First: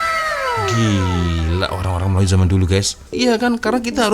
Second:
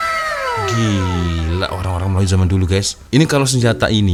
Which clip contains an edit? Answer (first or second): first